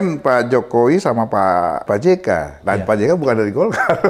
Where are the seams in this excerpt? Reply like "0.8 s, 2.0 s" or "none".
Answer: 1.8 s